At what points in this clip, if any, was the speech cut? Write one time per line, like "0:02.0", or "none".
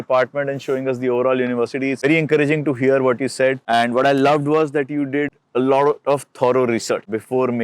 0:02.0